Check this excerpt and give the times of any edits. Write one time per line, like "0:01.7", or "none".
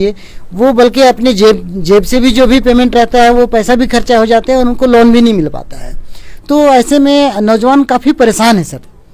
none